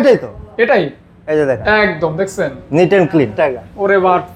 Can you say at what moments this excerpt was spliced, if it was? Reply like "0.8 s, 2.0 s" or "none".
3.3 s